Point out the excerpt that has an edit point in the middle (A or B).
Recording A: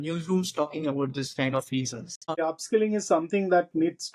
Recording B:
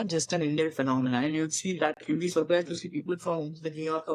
A